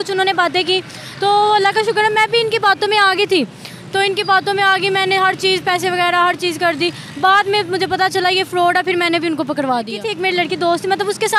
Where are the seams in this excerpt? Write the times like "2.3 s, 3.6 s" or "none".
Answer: 10.1 s